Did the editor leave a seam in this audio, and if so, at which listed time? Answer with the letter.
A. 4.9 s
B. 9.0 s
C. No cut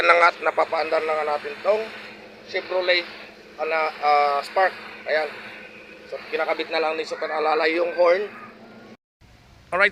B